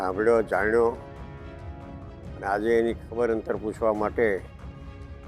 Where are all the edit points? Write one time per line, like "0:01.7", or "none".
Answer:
0:01.0
0:02.3